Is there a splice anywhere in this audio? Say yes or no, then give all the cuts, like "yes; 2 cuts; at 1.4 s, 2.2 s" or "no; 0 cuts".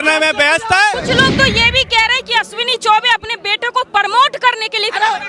yes; 1 cut; at 1.0 s